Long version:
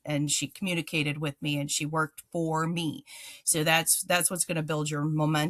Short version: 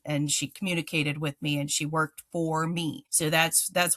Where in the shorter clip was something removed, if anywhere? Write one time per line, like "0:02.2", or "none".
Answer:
0:03.1